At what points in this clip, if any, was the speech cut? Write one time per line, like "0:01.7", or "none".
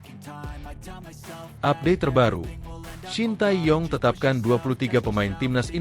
0:01.5